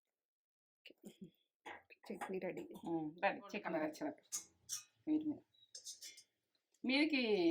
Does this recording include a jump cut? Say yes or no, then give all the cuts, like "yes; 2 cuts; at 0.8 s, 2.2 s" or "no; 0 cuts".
yes; 1 cut; at 3.9 s